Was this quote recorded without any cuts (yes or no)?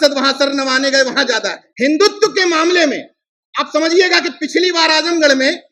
no